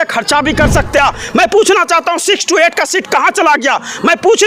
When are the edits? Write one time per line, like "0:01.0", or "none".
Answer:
0:01.0